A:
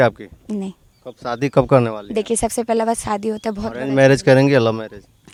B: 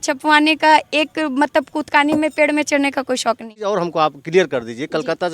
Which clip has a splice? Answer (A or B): B